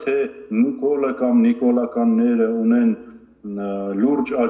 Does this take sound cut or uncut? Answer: uncut